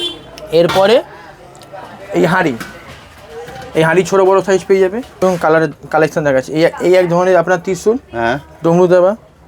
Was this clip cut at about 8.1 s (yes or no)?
no